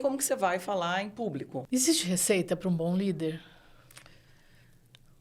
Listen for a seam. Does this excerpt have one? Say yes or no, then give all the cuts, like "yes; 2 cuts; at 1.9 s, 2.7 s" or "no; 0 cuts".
yes; 1 cut; at 1.6 s